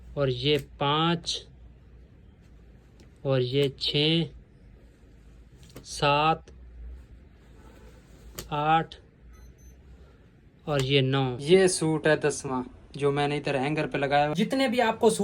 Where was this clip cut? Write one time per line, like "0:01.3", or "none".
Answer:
0:11.4
0:14.3